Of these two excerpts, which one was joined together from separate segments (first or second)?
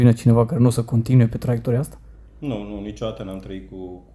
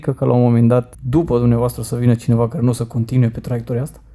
second